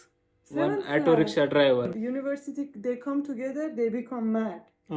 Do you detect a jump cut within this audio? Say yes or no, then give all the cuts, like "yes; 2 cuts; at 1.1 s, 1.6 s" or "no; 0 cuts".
yes; 1 cut; at 2.0 s